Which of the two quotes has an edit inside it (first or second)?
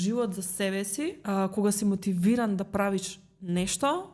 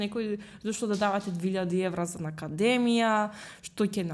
first